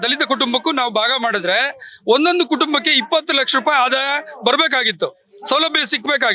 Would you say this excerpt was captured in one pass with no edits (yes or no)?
yes